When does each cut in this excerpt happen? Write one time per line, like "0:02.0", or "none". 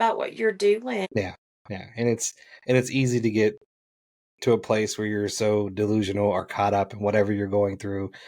0:01.1